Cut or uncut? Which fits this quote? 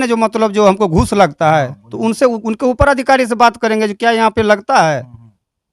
uncut